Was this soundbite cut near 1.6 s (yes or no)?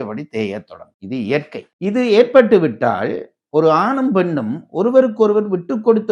yes